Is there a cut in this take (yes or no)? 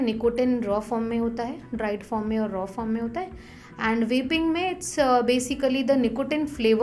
no